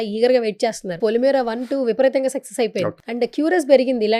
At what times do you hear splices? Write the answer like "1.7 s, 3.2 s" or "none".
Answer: 1.0 s, 3.0 s